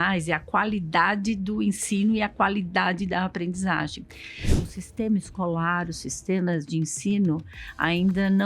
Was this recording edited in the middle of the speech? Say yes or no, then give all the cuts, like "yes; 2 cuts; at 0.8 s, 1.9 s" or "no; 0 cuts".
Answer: yes; 1 cut; at 4.6 s